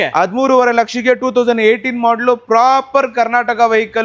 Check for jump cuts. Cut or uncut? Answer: uncut